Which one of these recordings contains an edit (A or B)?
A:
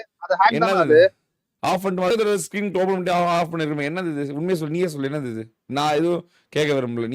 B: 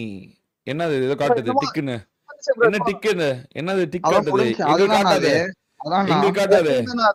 A